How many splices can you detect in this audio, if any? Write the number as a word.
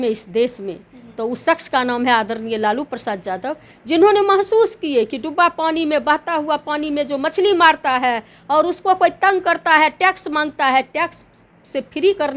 zero